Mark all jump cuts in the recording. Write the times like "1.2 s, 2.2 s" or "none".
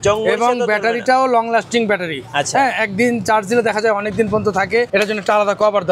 4.9 s

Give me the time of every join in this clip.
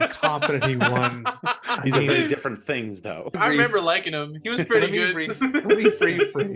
3.3 s

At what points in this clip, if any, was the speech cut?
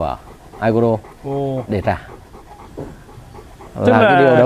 none

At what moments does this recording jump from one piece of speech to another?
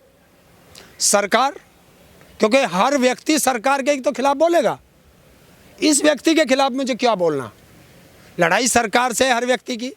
none

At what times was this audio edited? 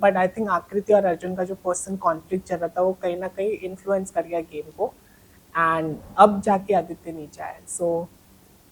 none

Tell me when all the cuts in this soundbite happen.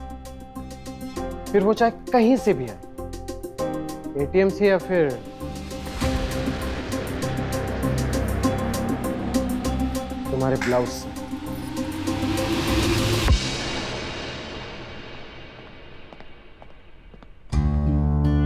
none

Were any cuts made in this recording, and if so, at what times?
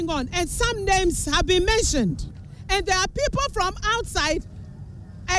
none

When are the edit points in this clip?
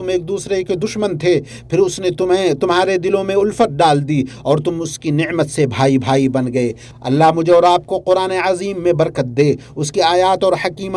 6.9 s

